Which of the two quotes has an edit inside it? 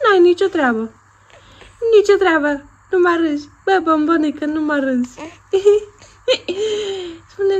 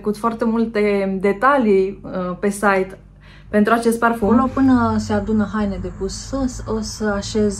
second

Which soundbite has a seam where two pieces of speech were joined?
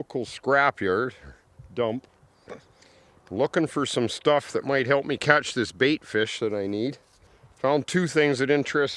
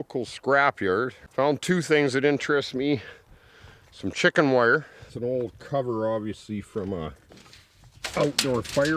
second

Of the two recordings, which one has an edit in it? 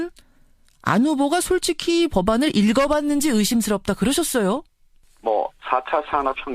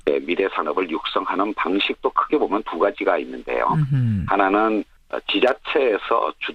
first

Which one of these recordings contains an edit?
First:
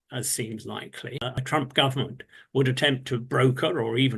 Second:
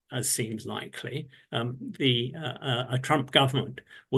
first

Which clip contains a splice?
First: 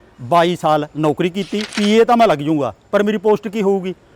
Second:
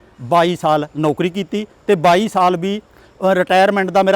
first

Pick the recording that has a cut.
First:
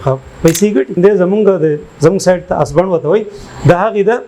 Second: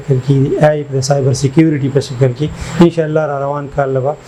first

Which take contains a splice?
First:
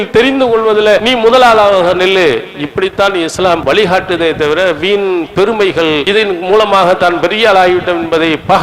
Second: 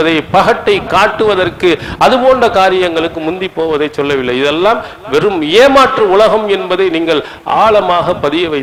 first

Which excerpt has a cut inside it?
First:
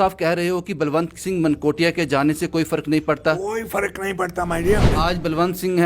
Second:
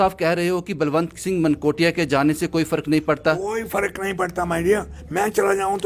first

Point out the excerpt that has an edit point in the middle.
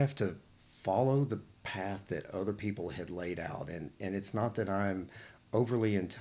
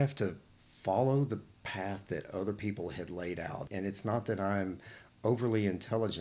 second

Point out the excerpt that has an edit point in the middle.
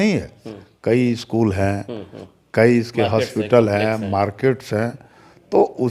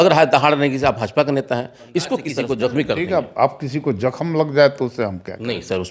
second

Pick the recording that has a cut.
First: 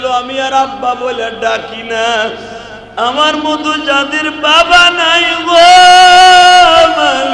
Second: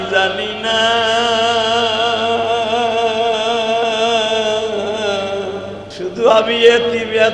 second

